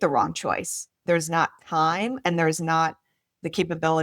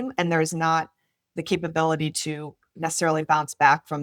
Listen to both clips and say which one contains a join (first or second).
first